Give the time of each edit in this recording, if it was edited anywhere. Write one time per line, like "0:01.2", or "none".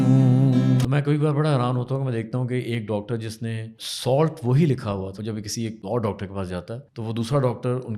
0:00.8
0:03.8
0:05.6
0:06.8